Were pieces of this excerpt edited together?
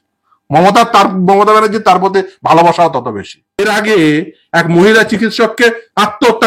yes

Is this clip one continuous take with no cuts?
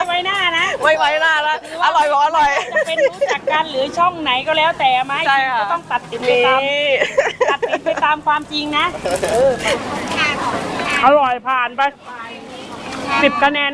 no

